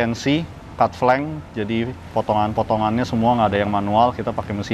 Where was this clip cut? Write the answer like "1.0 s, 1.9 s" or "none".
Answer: none